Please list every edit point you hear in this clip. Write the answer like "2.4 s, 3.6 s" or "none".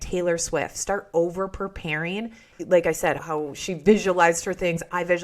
2.5 s